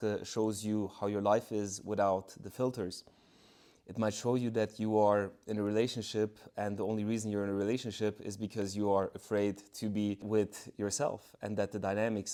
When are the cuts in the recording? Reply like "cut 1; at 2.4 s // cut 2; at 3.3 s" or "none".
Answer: none